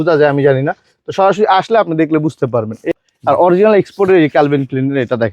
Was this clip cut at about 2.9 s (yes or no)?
yes